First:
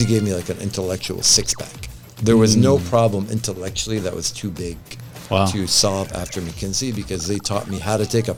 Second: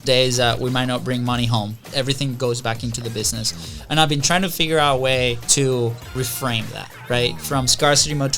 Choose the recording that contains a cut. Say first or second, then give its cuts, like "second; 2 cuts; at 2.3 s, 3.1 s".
second; 3 cuts; at 1.9 s, 5.4 s, 6.1 s